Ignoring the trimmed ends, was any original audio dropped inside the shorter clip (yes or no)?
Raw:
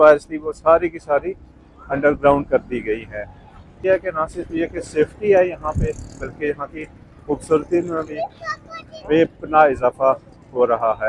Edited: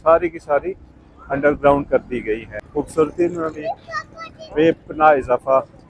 yes